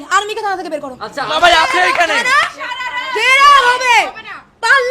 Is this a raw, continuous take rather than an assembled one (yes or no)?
no